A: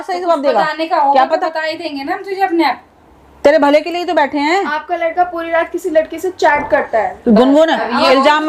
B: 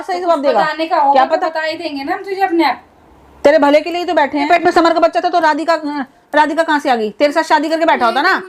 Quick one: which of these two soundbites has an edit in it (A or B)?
B